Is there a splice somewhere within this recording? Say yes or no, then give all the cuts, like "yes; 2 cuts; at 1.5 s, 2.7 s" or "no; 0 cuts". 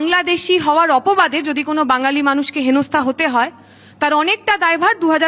no; 0 cuts